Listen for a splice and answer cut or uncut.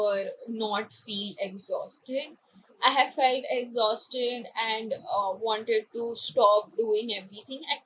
uncut